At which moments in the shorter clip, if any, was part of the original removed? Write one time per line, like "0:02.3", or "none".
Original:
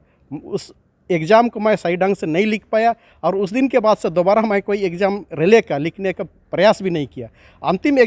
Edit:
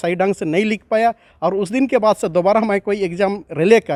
none